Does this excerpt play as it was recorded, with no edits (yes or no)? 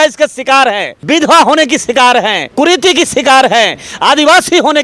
no